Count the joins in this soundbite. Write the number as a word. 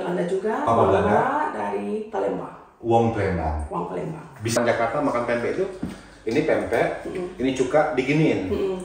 one